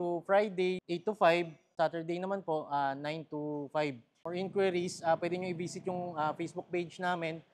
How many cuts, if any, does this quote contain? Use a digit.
3